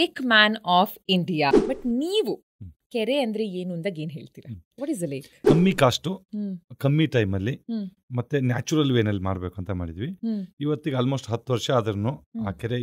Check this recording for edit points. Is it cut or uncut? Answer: cut